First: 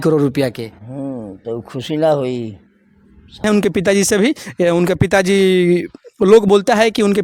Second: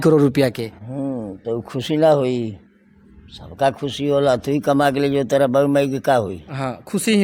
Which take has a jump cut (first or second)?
first